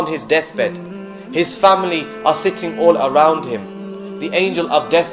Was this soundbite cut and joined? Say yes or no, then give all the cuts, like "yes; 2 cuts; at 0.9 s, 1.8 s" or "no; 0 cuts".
yes; 1 cut; at 4.0 s